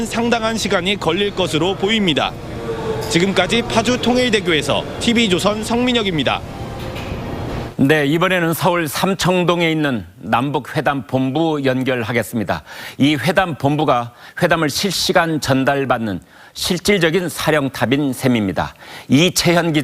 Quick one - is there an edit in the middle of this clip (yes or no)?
yes